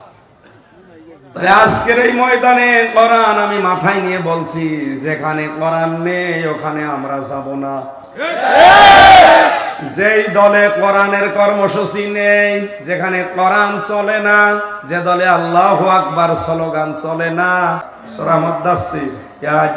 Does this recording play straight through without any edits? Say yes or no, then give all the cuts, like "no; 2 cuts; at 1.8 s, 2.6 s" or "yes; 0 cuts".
no; 1 cut; at 17.9 s